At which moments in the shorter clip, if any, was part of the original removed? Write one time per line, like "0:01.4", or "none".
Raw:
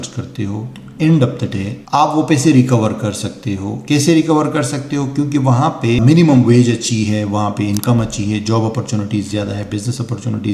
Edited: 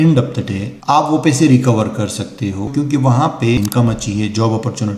0:02.7
0:03.6